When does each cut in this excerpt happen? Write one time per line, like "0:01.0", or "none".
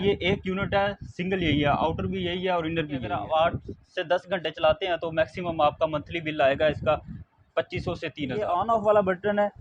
0:03.1
0:08.5